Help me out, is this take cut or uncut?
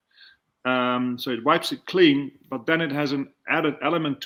uncut